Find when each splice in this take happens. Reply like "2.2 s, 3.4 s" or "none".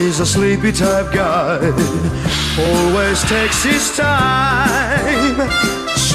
none